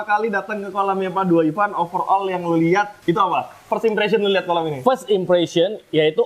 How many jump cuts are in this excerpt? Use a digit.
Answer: 1